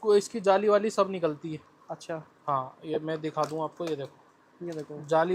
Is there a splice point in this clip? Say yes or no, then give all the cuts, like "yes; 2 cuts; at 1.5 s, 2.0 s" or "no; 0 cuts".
no; 0 cuts